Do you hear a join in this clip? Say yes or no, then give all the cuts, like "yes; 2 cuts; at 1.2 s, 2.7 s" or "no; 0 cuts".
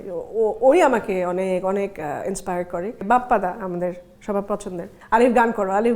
yes; 1 cut; at 3.0 s